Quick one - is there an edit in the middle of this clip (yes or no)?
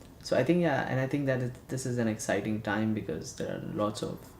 yes